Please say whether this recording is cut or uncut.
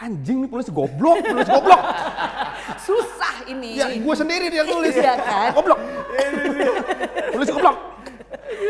uncut